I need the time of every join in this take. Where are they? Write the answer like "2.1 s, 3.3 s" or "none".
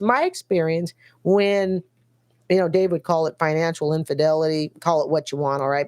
none